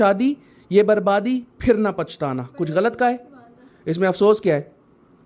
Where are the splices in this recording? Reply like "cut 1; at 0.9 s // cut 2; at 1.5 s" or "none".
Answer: none